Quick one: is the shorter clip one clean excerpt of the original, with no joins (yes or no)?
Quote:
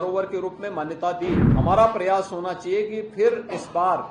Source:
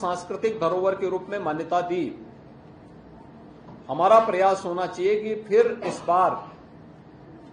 no